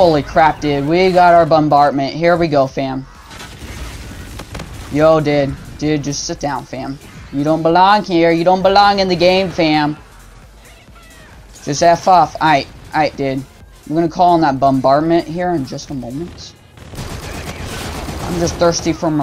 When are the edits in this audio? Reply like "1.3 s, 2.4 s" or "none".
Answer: none